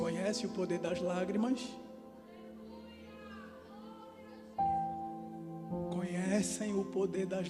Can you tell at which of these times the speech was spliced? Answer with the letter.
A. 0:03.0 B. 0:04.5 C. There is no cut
C